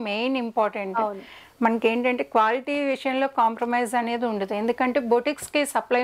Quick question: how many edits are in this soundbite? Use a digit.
0